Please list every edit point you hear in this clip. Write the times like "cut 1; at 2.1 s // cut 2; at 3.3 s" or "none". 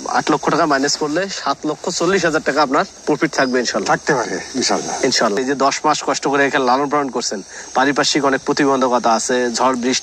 none